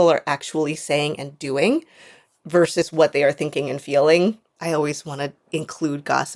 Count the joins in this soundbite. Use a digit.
2